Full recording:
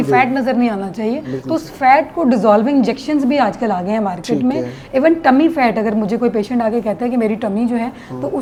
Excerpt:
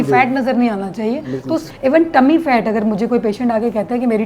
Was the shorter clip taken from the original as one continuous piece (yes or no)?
no